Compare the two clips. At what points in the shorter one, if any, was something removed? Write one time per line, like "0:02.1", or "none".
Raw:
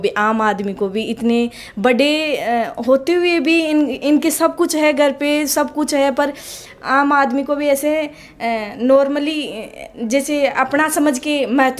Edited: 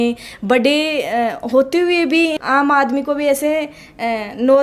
0:02.3

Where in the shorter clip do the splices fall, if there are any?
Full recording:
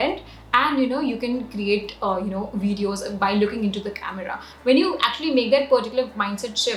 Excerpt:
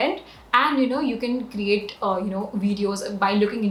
none

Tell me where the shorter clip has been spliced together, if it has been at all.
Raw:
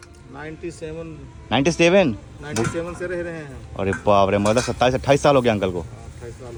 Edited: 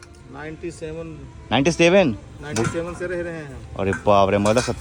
none

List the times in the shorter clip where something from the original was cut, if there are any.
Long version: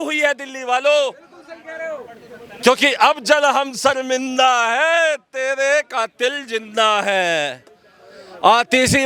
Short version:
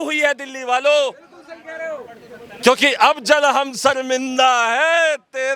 none

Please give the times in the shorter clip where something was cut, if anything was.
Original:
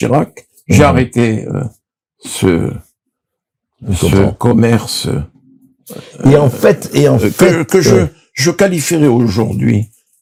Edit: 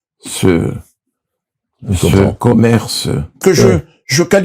0:03.4

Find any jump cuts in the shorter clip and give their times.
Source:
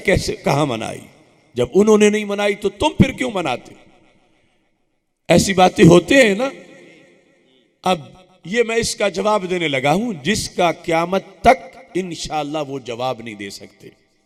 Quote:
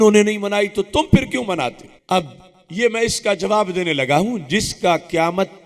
0:01.9

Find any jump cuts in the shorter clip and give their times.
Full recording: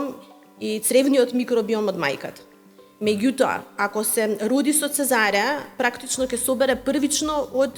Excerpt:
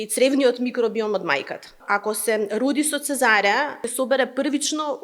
0:01.8
0:03.8

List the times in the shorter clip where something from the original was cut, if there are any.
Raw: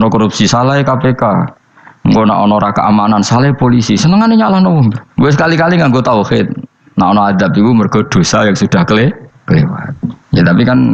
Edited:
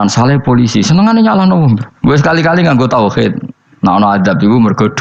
none

